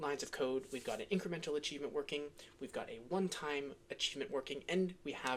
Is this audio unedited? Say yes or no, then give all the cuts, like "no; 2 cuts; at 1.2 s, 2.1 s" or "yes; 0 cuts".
yes; 0 cuts